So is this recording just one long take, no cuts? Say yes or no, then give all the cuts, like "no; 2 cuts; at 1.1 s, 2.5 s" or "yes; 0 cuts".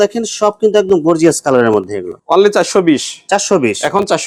yes; 0 cuts